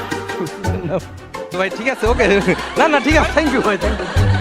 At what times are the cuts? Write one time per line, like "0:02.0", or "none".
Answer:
0:01.5